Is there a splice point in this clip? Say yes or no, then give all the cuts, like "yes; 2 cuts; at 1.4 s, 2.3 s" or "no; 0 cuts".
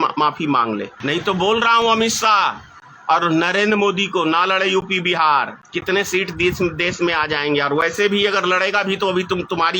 yes; 2 cuts; at 0.9 s, 5.6 s